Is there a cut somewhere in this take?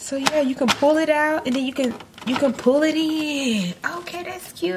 no; 0 cuts

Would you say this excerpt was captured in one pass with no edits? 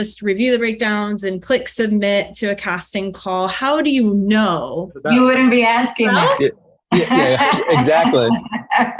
no; 1 cut; at 5.0 s

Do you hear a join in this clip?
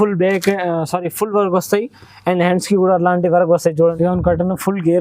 yes; 1 cut; at 3.9 s

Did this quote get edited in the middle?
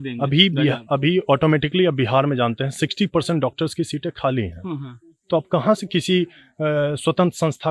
no; 0 cuts

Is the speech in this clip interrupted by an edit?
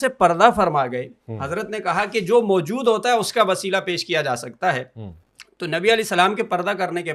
no; 0 cuts

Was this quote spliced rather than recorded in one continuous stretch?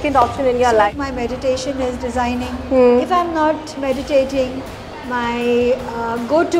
yes; 1 cut; at 0.9 s

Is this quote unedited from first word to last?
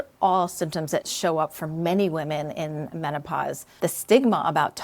no; 2 cuts; at 1.1 s, 3.8 s

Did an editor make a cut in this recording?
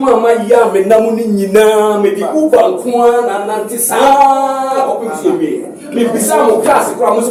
no; 0 cuts

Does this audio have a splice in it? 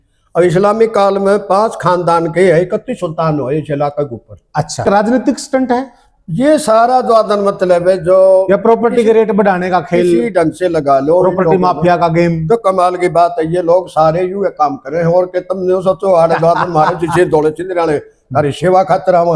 yes; 1 cut; at 4.8 s

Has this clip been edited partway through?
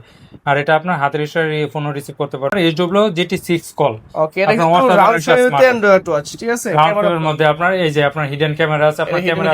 yes; 1 cut; at 2.5 s

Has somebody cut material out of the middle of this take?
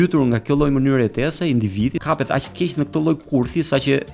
yes; 1 cut; at 2.0 s

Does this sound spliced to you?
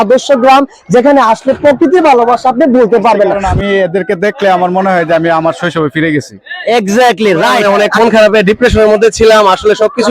yes; 2 cuts; at 3.4 s, 7.6 s

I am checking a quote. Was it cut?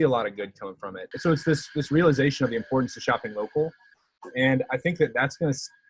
yes; 1 cut; at 1.0 s

